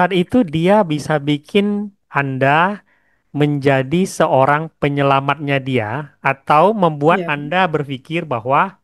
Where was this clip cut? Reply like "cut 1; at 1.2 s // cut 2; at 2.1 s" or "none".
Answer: none